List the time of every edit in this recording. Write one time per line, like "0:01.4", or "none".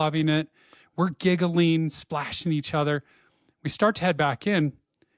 none